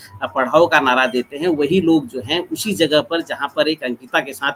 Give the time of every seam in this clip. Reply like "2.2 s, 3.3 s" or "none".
none